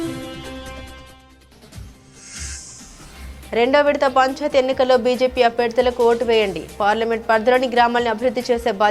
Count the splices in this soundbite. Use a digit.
0